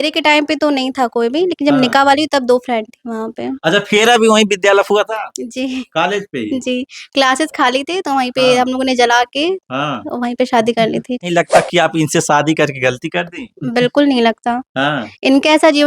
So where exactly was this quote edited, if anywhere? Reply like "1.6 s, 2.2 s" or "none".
11.3 s